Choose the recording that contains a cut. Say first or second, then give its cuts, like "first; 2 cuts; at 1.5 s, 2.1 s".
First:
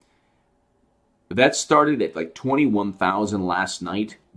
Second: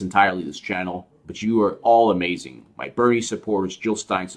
second; 1 cut; at 2.2 s